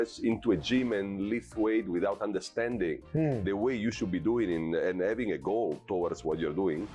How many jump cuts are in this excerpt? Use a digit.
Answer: 0